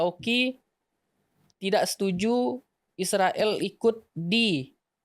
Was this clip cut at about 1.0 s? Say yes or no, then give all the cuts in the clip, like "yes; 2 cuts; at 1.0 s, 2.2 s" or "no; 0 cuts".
no; 1 cut; at 4.1 s